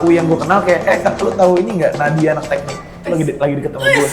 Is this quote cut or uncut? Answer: uncut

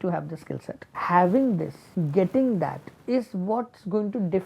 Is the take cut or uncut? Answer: cut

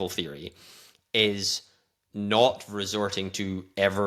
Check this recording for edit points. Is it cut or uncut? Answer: uncut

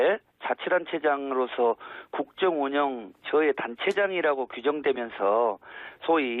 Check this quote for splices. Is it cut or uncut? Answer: cut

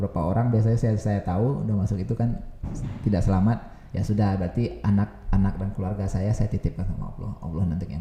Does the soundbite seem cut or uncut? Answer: uncut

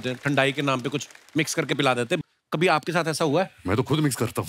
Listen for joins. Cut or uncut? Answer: uncut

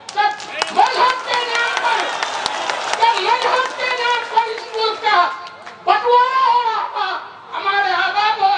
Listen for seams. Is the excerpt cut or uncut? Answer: uncut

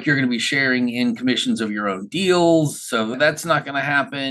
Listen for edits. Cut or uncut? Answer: cut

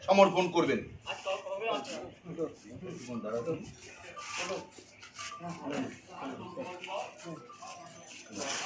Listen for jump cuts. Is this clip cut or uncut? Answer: uncut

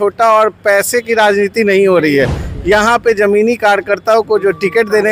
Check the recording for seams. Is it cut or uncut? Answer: uncut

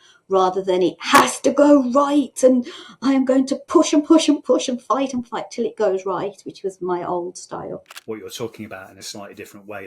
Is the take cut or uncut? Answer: cut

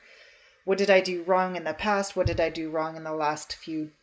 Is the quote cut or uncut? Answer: uncut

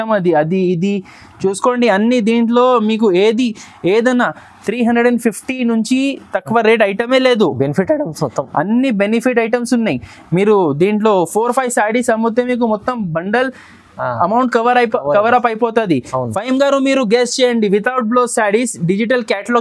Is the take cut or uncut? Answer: uncut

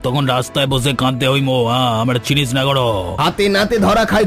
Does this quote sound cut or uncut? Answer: cut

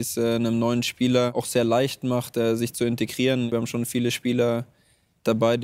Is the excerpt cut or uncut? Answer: cut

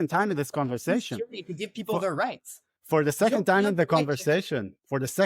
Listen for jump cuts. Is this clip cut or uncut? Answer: uncut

